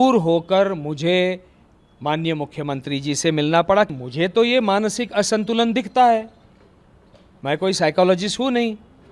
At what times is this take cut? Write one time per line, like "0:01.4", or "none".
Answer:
0:03.9